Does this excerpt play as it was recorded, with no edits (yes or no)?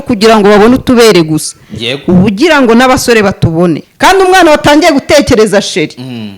no